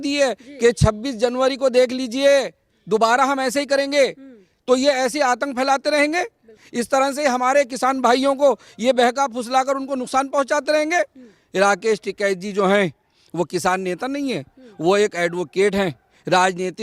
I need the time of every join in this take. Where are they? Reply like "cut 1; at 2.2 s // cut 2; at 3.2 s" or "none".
none